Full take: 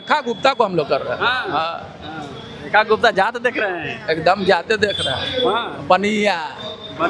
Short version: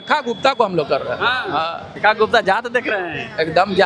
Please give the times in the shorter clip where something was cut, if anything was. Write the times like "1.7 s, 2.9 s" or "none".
1.8 s